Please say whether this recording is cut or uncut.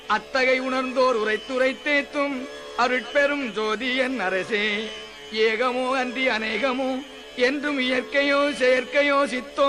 cut